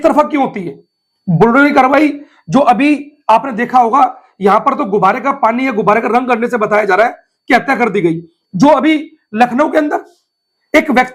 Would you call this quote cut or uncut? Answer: uncut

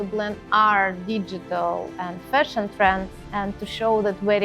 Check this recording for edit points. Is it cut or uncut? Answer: cut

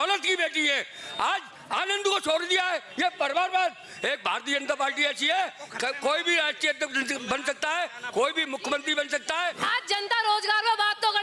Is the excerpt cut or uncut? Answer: cut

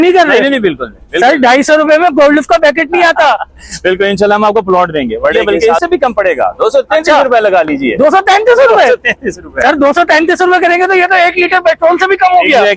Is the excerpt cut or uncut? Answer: cut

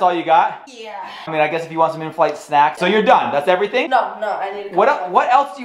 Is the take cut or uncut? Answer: cut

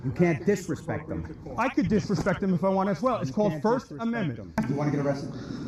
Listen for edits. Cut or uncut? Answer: uncut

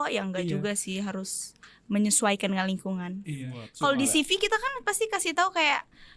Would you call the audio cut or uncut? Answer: cut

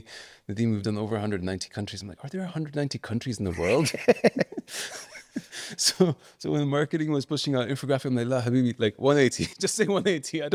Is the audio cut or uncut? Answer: uncut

